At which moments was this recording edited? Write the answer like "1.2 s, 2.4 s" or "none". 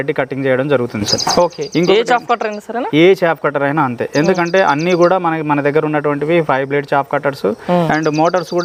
none